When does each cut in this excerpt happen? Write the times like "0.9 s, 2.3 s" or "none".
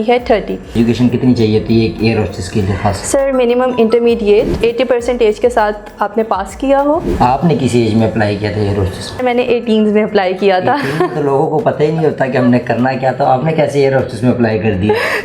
0.8 s, 4.5 s, 7.1 s, 9.2 s